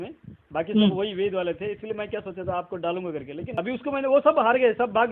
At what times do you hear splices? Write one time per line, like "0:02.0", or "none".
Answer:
0:03.6